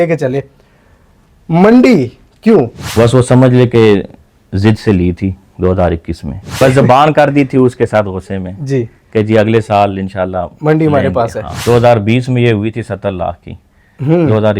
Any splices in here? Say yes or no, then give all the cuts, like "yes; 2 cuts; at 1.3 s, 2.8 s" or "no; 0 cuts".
yes; 3 cuts; at 2.8 s, 6.6 s, 11.5 s